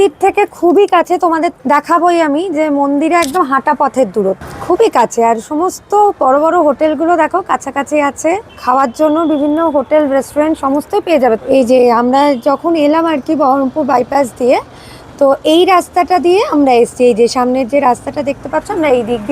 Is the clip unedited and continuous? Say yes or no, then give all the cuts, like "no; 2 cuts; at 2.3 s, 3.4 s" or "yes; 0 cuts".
no; 4 cuts; at 1.6 s, 4.5 s, 8.6 s, 11.4 s